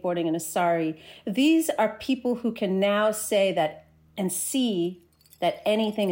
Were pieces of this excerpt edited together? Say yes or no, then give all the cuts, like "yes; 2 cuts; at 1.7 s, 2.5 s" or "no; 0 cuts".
no; 0 cuts